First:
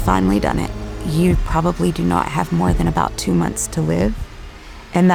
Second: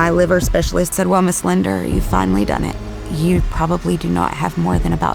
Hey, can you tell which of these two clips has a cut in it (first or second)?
second